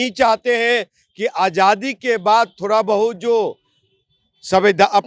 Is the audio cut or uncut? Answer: uncut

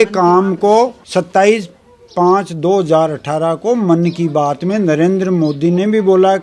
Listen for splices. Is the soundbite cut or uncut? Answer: uncut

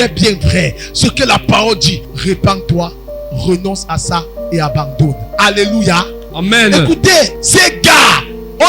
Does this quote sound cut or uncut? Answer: cut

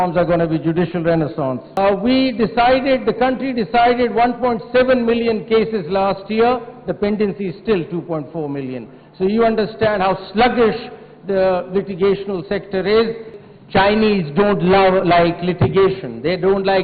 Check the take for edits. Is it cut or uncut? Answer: cut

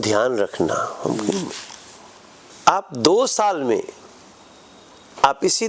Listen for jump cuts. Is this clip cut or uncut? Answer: cut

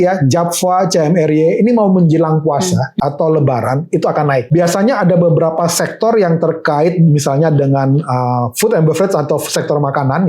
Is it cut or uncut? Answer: cut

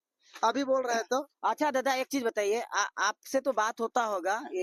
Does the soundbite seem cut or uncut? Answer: uncut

